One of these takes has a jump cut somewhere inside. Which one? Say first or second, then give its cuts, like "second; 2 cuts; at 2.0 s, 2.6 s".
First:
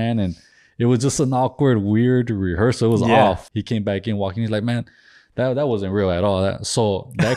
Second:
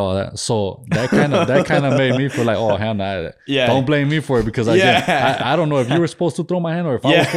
first; 1 cut; at 3.5 s